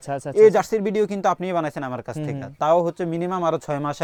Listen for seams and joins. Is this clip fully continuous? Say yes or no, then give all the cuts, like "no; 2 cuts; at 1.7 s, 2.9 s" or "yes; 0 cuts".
yes; 0 cuts